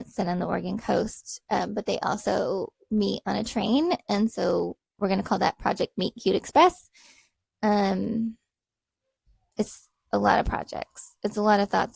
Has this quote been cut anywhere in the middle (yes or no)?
no